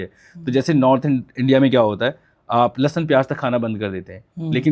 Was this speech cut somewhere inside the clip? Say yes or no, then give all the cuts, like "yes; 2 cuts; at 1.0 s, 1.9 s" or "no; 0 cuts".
no; 0 cuts